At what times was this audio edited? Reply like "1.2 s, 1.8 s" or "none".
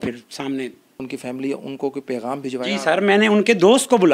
1.0 s